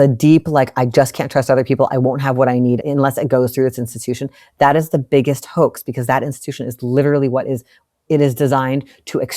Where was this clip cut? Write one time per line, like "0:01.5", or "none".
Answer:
0:02.8